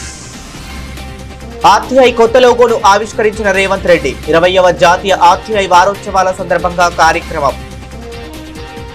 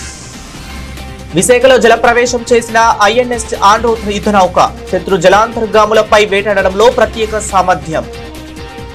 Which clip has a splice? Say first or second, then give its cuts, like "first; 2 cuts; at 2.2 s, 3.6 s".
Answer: first; 2 cuts; at 1.3 s, 8.0 s